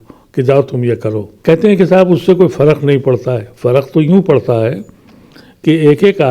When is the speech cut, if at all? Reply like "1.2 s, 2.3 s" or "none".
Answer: 1.3 s